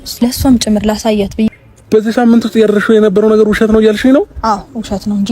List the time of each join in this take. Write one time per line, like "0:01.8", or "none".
0:01.5